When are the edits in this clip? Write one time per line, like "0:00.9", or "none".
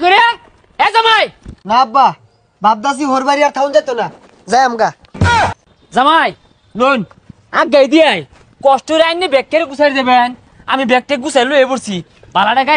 none